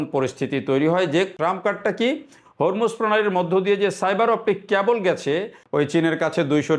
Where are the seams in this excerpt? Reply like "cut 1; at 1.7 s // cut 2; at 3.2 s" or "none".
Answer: cut 1; at 1.3 s // cut 2; at 5.6 s